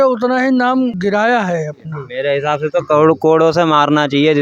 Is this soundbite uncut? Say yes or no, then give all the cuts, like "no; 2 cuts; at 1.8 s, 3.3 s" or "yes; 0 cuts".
no; 2 cuts; at 1.0 s, 2.0 s